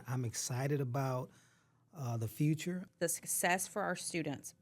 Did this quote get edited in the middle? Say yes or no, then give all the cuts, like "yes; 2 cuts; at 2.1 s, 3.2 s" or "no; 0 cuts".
yes; 1 cut; at 2.9 s